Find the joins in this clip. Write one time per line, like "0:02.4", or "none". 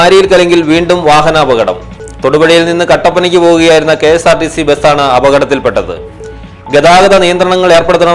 none